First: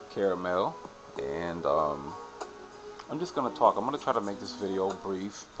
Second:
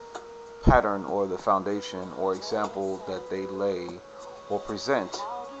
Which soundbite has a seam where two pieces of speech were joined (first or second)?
second